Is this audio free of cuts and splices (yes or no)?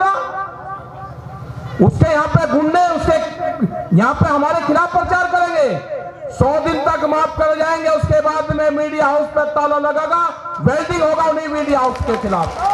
yes